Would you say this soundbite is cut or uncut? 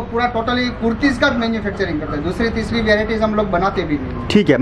uncut